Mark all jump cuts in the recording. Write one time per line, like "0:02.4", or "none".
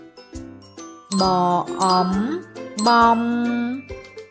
none